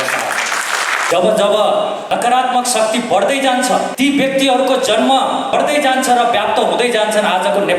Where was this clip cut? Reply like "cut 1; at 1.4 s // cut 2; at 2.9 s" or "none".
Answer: cut 1; at 1.1 s // cut 2; at 2.0 s // cut 3; at 3.9 s // cut 4; at 5.5 s

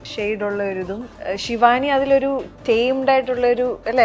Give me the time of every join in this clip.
cut 1; at 1.1 s

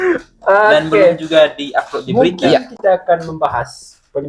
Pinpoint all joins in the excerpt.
none

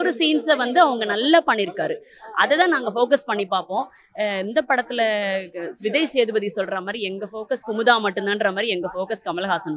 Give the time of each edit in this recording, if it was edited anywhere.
none

